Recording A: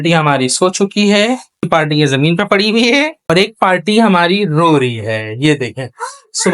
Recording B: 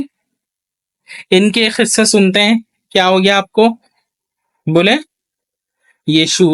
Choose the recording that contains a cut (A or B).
A